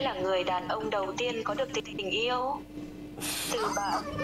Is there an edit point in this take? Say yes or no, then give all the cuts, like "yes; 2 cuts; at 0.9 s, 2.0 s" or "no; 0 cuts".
yes; 1 cut; at 1.9 s